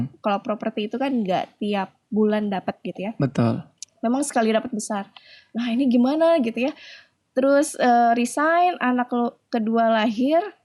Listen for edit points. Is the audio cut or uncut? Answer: uncut